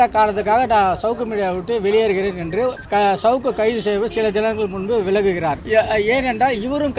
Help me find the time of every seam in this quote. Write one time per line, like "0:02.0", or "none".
0:02.8
0:05.6